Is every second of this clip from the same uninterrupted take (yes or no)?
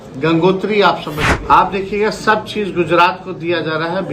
no